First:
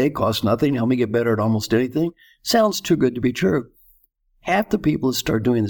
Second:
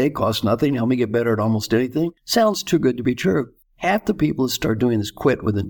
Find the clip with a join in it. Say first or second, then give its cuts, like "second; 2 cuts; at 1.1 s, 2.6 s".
second; 2 cuts; at 2.2 s, 3.6 s